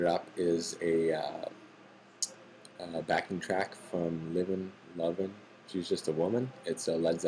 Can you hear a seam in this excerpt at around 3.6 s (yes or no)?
yes